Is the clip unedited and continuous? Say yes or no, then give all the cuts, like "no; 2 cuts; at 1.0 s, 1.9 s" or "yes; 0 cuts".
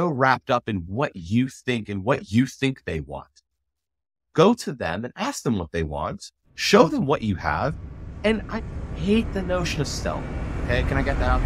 yes; 0 cuts